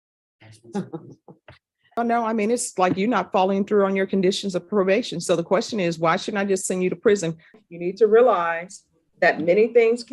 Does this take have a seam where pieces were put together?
yes; 2 cuts; at 2.0 s, 7.6 s

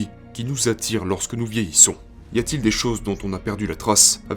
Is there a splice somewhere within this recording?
yes; 1 cut; at 2.1 s

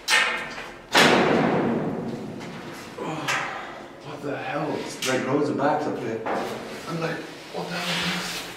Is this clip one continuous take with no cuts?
yes; 0 cuts

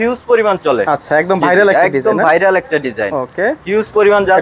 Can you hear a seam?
no; 0 cuts

